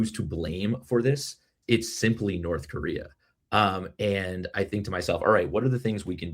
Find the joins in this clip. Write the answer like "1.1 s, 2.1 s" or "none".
1.5 s